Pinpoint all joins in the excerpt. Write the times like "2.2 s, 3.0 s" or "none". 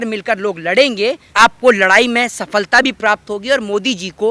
1.2 s